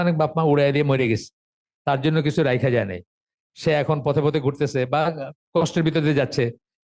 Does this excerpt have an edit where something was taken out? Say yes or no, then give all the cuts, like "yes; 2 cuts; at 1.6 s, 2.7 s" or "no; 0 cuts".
no; 0 cuts